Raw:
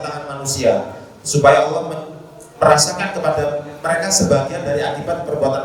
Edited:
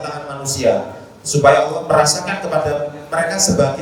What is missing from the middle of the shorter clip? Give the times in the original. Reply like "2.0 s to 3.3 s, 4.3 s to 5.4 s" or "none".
1.8 s to 2.5 s